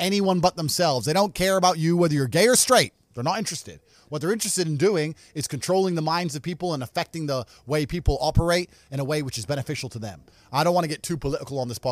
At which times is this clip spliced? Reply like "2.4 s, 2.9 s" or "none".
none